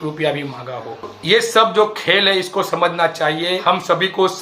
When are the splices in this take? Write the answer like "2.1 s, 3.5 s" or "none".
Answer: 1.1 s, 3.6 s